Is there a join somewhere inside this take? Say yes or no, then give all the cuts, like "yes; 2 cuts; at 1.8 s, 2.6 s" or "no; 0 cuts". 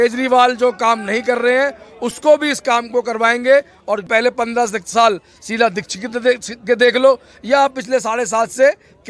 yes; 1 cut; at 4.1 s